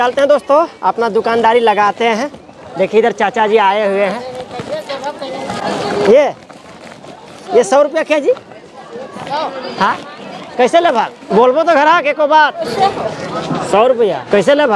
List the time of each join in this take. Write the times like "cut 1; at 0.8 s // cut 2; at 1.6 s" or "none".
none